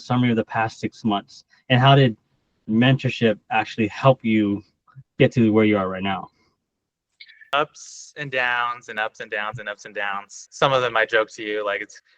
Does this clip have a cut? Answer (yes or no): yes